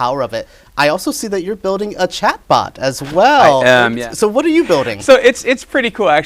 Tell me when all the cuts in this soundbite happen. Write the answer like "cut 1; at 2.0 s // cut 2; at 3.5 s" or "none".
cut 1; at 4.0 s